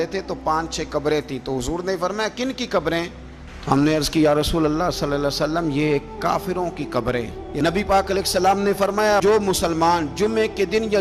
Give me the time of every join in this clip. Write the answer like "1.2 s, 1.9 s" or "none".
7.4 s